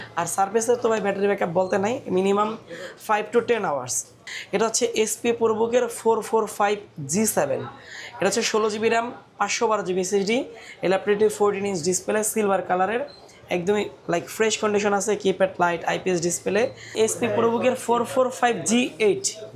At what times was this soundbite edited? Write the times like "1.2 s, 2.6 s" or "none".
4.2 s, 16.9 s